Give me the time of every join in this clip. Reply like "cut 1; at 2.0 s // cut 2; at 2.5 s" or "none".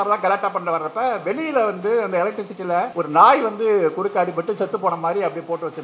cut 1; at 2.9 s